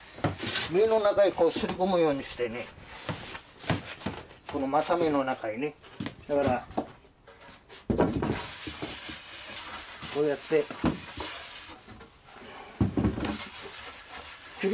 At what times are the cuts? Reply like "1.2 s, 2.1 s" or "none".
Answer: 11.4 s